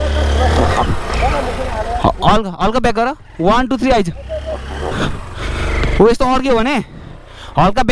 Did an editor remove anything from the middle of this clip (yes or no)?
no